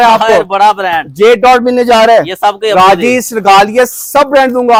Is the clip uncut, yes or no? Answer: yes